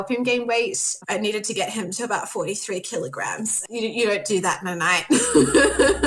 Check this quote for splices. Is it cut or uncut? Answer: cut